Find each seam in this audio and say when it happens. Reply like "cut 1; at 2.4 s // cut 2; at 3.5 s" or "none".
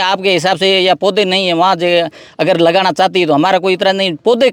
none